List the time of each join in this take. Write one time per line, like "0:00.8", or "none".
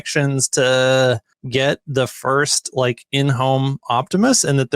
0:01.3